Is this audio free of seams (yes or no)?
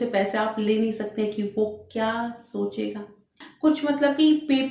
no